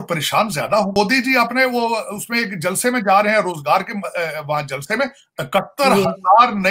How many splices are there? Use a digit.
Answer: 1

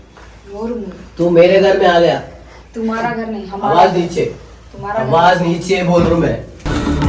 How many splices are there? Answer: 0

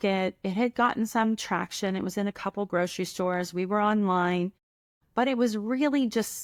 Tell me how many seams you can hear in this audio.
0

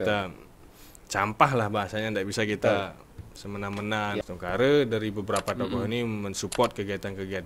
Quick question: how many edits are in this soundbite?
1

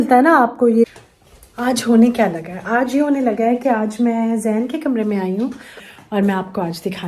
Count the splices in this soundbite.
2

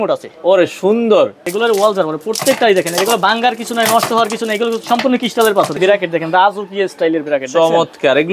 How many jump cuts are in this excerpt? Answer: 2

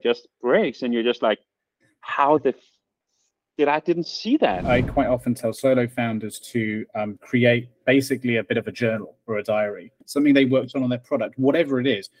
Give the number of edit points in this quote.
2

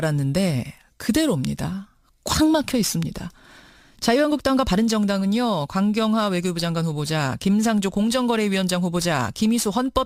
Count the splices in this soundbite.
0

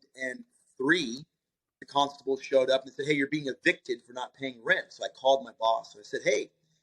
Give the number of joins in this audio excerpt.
1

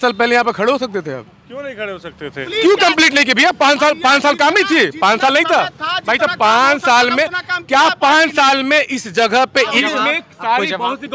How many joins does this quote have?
2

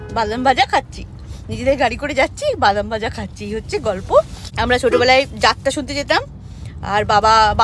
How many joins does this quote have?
1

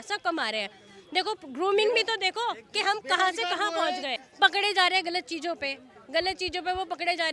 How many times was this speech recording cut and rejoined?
1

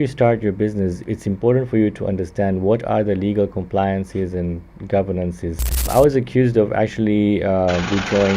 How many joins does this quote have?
2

